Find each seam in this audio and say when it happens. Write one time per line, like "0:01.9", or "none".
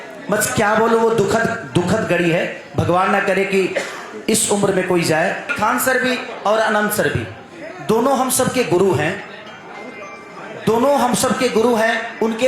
0:05.5